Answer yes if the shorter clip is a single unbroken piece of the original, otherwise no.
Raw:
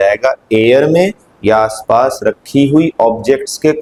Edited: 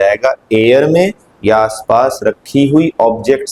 yes